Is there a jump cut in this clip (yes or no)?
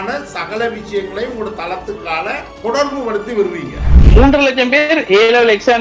yes